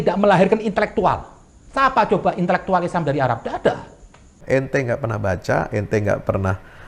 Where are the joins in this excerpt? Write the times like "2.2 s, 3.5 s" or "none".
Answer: 4.4 s